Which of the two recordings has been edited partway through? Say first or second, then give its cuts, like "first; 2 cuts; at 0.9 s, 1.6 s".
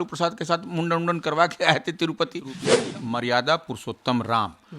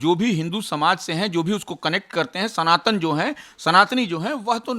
first; 1 cut; at 2.6 s